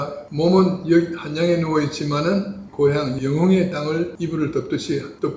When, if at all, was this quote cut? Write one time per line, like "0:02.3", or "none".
0:02.6